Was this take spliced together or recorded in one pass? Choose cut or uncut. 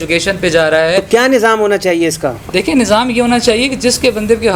uncut